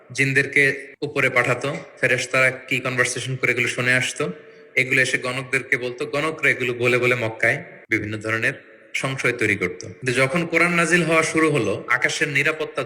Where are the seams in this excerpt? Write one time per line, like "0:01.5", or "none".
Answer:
0:00.9
0:07.7
0:09.9